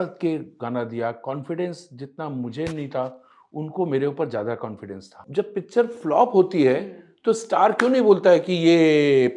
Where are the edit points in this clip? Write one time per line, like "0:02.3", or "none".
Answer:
0:05.1